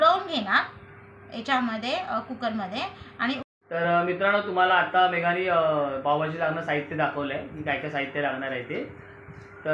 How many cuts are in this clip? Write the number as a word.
zero